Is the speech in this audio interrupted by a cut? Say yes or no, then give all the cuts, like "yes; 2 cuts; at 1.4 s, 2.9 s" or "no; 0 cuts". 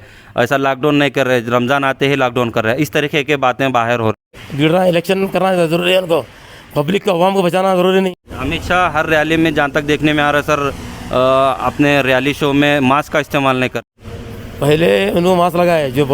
yes; 3 cuts; at 4.3 s, 8.1 s, 13.7 s